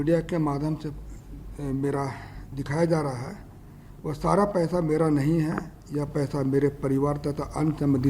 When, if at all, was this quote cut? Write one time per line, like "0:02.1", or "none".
none